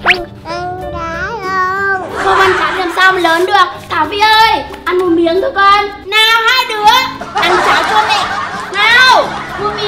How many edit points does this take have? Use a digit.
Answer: 1